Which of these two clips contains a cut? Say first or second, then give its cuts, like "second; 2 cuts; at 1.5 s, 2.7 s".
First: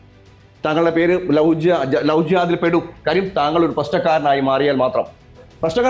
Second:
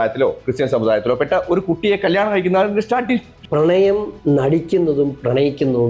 second; 1 cut; at 3.4 s